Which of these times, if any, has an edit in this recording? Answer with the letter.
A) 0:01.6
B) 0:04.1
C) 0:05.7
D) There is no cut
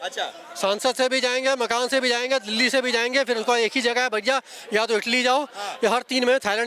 D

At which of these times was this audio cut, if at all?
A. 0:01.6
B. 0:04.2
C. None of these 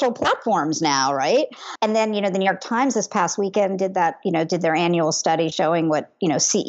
A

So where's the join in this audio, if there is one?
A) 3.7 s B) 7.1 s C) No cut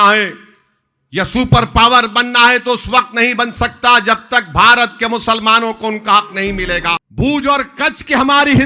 B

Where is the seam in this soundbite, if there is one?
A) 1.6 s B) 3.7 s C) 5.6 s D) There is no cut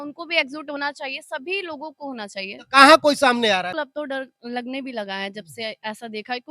B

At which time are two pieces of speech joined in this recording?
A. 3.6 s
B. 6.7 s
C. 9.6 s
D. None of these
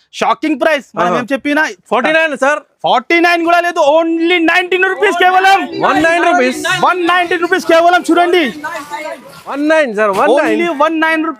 C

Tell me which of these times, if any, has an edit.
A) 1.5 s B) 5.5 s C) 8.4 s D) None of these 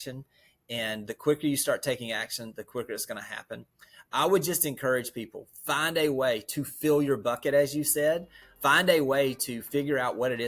C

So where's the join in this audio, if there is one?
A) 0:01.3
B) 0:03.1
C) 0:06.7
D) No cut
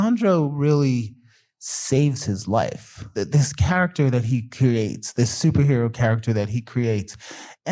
B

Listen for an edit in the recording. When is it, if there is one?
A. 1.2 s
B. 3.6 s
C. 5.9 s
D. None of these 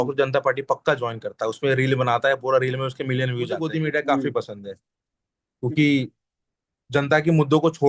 B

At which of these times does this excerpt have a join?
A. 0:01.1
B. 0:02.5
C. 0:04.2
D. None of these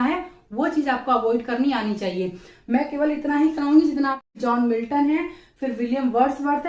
C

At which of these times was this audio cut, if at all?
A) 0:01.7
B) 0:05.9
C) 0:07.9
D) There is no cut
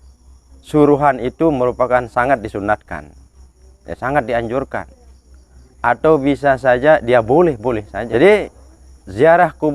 C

